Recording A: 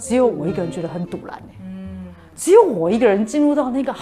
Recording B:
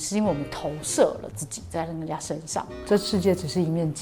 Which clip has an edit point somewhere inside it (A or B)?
B